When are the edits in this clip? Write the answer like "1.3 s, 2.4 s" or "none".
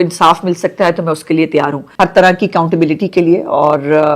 1.9 s

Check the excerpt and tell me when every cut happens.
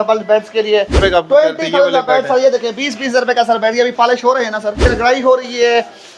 1.0 s, 4.8 s

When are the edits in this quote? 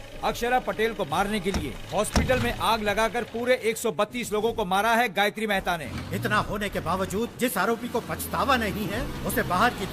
5.8 s

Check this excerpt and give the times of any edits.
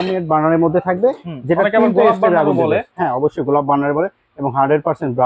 none

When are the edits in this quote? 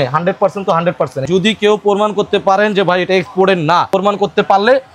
1.3 s, 3.9 s

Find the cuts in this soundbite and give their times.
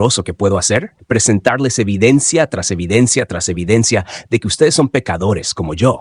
0.9 s

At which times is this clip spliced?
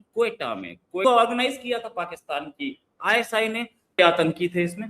1.0 s, 4.0 s

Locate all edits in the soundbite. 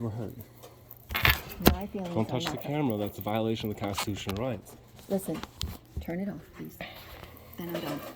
none

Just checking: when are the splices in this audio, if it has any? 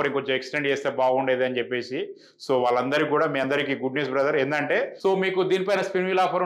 4.9 s

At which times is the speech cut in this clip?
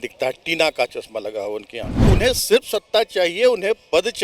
2.1 s

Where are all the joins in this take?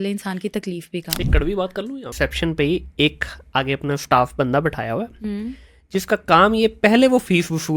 2.1 s

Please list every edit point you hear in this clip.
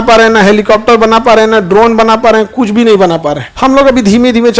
3.4 s

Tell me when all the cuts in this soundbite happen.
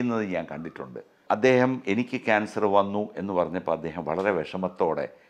1.2 s

